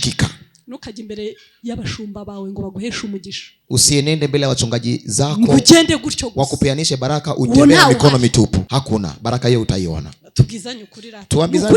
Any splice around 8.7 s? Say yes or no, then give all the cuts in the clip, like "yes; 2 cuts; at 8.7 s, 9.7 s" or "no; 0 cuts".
yes; 1 cut; at 8.7 s